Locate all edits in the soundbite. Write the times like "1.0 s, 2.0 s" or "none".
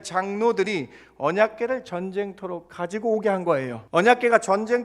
3.8 s